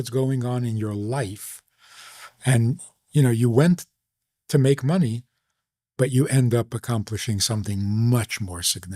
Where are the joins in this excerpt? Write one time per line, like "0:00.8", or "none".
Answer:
none

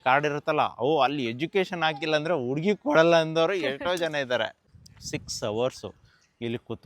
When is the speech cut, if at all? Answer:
0:04.6

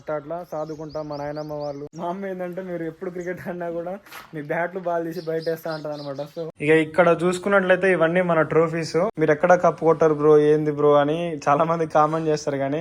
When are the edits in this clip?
0:01.9
0:06.5
0:09.1

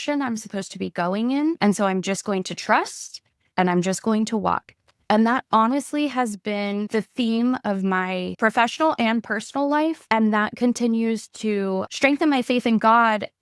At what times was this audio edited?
0:01.6
0:06.9
0:08.3
0:10.0
0:11.8

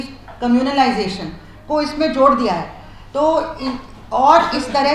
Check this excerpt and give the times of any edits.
none

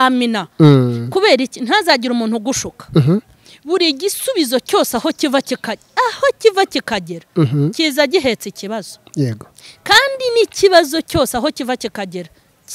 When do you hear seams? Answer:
none

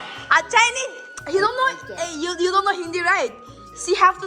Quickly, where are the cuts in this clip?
none

